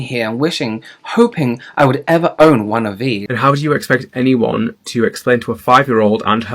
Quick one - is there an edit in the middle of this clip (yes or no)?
yes